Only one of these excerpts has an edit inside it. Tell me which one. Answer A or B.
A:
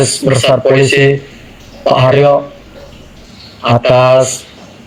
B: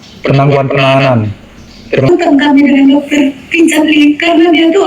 B